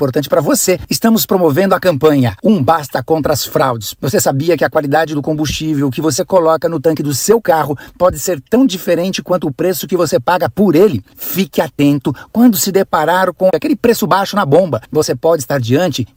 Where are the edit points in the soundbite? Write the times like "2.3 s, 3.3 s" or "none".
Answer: none